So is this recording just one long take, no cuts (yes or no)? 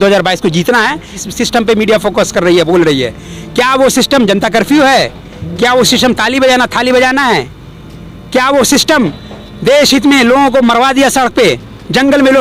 no